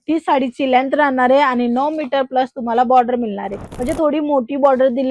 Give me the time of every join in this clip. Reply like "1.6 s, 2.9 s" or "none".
3.6 s